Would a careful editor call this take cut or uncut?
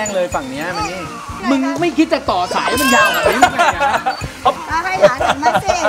cut